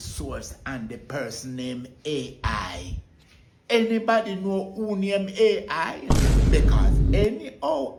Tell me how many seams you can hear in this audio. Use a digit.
0